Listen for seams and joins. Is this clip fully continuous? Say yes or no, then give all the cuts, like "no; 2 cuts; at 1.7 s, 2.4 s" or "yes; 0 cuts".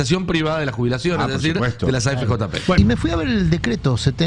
no; 1 cut; at 2.8 s